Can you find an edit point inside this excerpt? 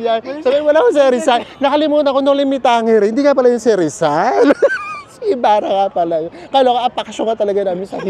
no; 0 cuts

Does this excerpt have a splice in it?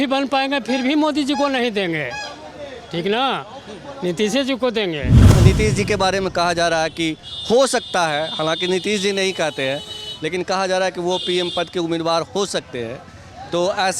yes; 1 cut; at 5.3 s

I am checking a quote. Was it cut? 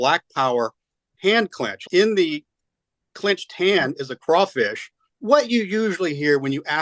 yes; 2 cuts; at 1.8 s, 5.2 s

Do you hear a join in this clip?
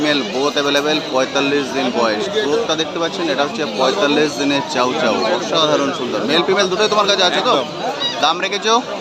no; 0 cuts

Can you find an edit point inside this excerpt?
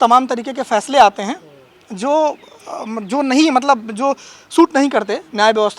no; 0 cuts

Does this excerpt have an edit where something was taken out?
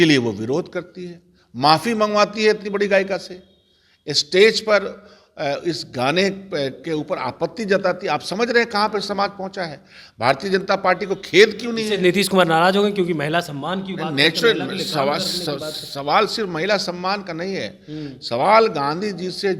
no; 0 cuts

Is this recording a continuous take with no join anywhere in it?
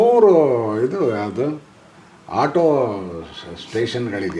yes; 0 cuts

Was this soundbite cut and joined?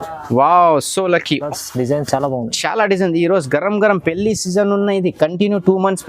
yes; 1 cut; at 1.5 s

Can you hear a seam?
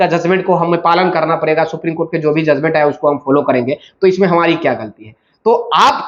no; 0 cuts

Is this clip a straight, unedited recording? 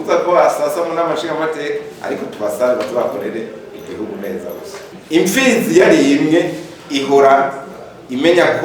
yes; 0 cuts

